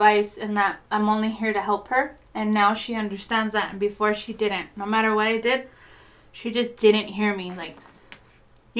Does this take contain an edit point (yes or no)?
no